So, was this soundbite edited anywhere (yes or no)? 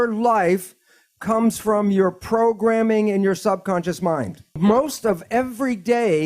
yes